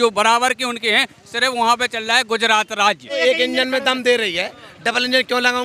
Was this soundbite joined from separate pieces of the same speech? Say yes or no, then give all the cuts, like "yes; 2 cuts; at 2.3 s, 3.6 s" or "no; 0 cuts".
yes; 1 cut; at 3.2 s